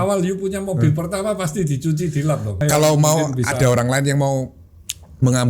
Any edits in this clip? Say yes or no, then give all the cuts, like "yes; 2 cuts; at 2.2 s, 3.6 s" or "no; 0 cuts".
yes; 1 cut; at 2.6 s